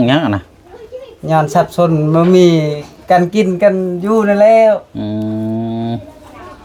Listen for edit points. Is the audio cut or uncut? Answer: uncut